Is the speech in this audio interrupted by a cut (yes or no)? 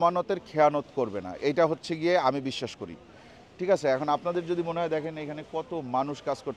no